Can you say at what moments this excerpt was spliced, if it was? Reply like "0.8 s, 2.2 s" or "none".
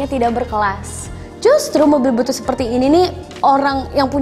none